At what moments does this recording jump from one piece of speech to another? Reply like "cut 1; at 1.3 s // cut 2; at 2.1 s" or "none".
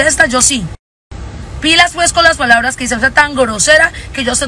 none